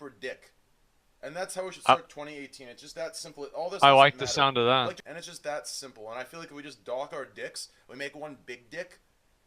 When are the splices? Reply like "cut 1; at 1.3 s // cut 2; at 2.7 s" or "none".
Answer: cut 1; at 5.1 s